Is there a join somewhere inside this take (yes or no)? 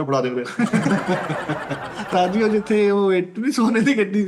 yes